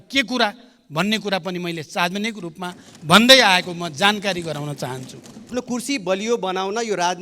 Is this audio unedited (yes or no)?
no